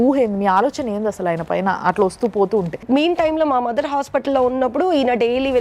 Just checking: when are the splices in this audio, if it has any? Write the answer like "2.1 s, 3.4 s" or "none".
2.8 s